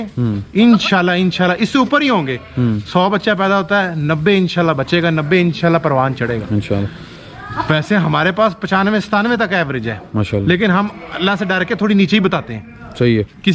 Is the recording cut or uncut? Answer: uncut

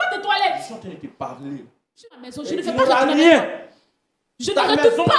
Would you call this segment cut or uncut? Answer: cut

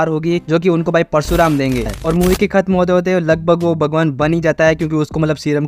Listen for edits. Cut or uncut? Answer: cut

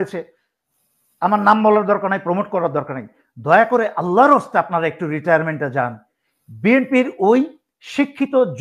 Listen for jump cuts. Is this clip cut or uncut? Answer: uncut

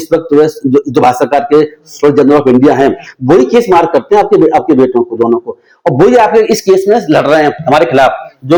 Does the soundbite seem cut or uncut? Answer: uncut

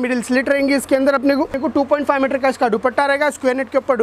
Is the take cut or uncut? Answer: cut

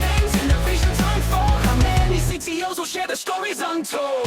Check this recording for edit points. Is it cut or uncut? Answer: uncut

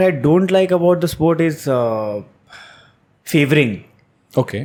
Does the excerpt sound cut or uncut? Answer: uncut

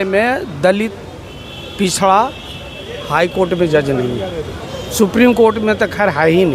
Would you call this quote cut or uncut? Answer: uncut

